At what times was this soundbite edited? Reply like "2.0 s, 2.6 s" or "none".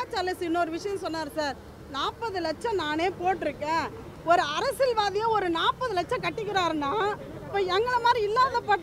none